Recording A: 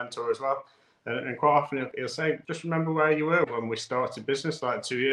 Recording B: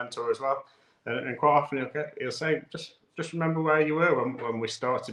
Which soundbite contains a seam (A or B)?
A